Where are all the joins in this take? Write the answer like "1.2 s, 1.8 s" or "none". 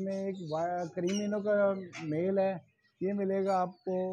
none